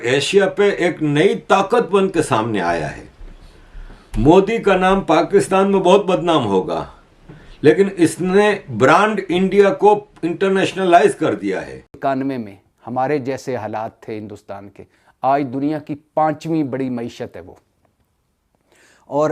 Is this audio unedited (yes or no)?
no